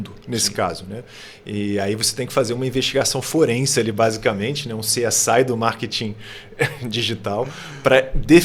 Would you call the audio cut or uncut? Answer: uncut